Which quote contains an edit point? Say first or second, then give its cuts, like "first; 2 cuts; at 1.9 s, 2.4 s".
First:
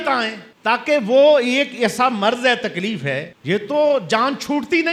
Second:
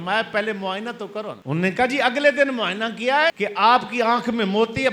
second; 1 cut; at 1.4 s